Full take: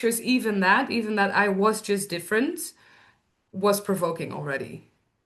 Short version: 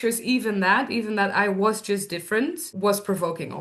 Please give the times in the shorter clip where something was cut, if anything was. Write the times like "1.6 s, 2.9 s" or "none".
2.7 s